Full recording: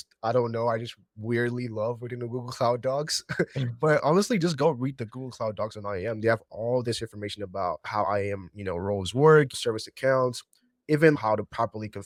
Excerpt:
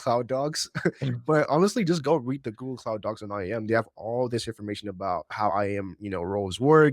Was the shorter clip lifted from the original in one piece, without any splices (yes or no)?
yes